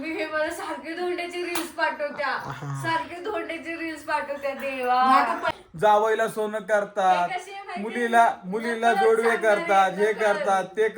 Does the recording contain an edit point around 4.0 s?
no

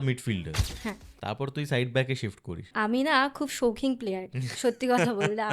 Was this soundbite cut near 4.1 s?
no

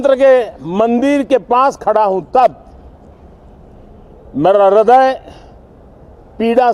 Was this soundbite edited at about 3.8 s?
no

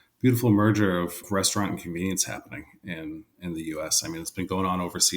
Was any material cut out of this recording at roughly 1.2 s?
yes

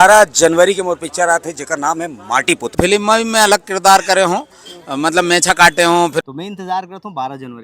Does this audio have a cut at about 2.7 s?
yes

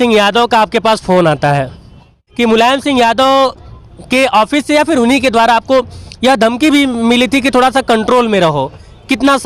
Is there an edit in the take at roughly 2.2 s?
yes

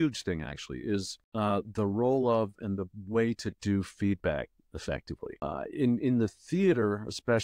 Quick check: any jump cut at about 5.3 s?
yes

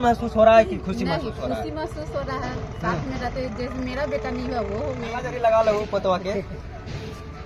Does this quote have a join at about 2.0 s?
no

